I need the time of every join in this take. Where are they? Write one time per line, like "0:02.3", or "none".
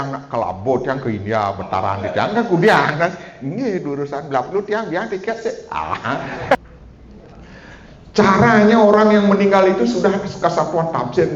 0:06.6